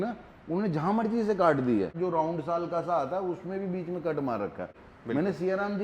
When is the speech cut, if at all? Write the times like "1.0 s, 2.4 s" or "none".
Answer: 1.9 s, 4.9 s